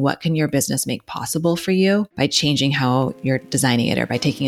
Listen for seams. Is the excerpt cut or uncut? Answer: cut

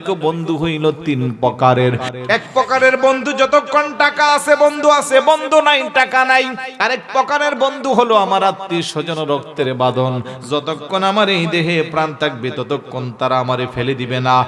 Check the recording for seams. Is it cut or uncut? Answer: cut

